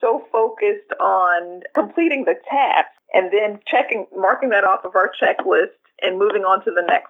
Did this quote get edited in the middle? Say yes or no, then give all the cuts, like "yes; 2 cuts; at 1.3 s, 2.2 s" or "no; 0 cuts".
yes; 2 cuts; at 1.6 s, 3.0 s